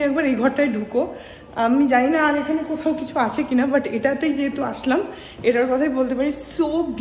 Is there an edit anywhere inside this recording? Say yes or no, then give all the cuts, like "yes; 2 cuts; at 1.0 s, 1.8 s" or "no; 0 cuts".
no; 0 cuts